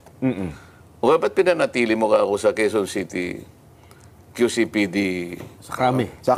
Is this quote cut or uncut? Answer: uncut